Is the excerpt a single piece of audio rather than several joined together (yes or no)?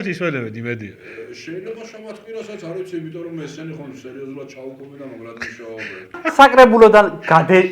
no